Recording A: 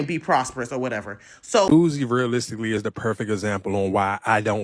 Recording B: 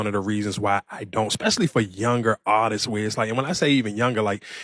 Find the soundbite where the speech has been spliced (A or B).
A